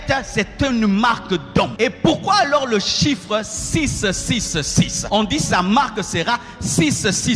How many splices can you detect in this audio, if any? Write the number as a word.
two